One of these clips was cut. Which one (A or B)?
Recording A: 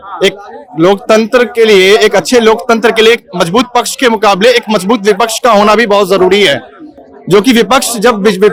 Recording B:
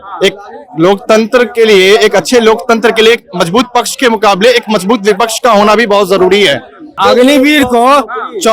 B